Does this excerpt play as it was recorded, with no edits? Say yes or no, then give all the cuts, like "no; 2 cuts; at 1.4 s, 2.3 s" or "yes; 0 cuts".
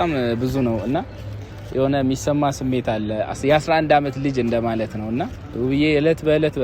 no; 1 cut; at 5.5 s